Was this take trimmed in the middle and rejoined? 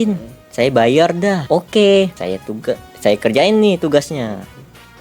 yes; 2 cuts; at 1.4 s, 2.2 s

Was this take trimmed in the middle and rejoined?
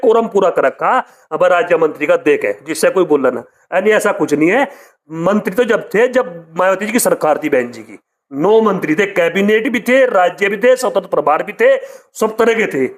no; 0 cuts

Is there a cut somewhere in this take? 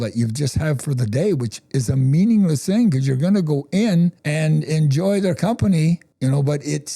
yes; 2 cuts; at 4.2 s, 6.1 s

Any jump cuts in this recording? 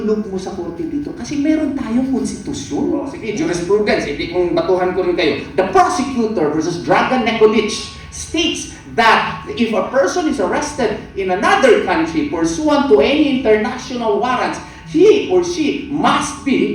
yes; 1 cut; at 3.2 s

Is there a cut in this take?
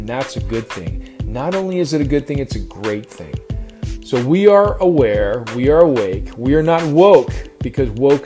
no; 0 cuts

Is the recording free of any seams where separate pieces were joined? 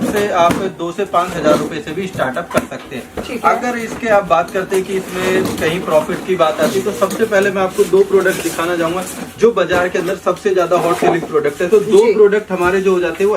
yes; 0 cuts

